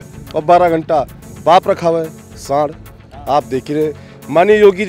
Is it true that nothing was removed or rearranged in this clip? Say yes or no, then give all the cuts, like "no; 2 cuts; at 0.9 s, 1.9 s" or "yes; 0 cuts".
yes; 0 cuts